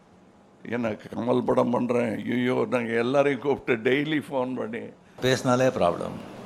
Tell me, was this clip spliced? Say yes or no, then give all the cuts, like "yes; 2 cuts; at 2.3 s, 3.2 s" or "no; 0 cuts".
yes; 1 cut; at 5.2 s